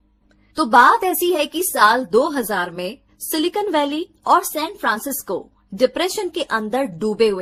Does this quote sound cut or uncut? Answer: uncut